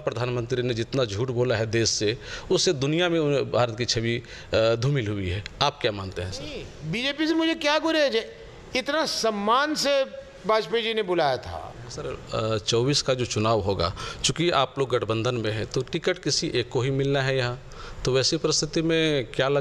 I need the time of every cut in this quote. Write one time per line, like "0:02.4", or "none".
0:06.7
0:12.2